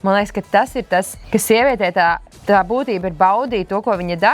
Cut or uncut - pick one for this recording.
cut